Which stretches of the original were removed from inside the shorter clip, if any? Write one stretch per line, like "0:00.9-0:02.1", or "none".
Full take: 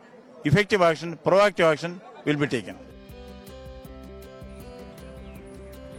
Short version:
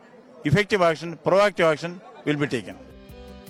none